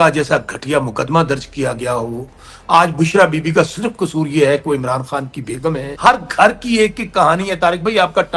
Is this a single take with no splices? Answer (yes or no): no